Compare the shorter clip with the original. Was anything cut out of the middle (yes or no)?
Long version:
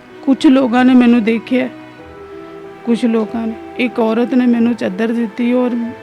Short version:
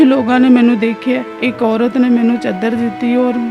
yes